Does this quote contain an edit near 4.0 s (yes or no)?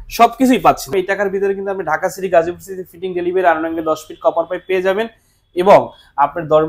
no